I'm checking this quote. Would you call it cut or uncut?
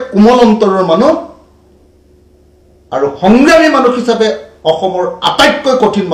uncut